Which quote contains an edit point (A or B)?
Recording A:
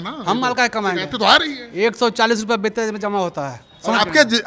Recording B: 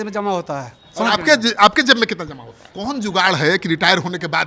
B